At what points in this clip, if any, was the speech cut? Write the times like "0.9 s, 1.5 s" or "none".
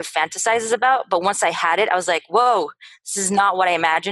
none